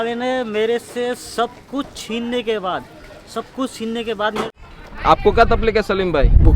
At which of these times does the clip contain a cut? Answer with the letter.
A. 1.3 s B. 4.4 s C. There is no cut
B